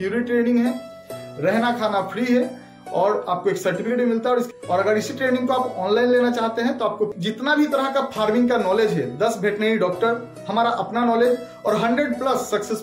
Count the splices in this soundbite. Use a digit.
2